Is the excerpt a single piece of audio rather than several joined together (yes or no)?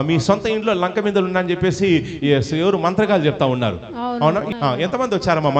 no